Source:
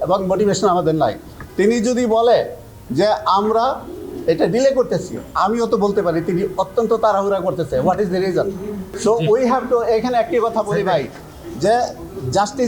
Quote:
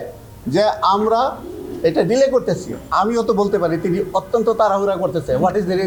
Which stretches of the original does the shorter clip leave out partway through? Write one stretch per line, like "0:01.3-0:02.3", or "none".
none